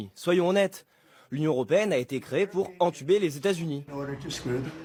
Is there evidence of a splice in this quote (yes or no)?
no